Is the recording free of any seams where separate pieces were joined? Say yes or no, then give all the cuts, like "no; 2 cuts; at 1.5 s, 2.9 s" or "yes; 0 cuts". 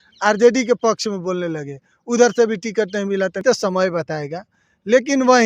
no; 1 cut; at 3.4 s